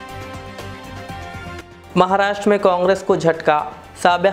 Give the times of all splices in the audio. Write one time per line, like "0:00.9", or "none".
0:01.3